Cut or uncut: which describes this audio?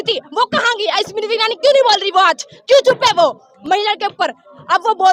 uncut